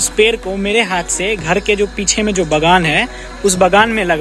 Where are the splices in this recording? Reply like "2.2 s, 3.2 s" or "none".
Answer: none